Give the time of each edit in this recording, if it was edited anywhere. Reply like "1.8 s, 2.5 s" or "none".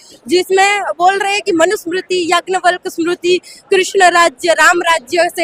none